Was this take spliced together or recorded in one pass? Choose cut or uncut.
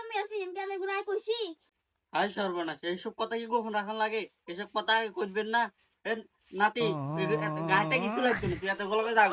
uncut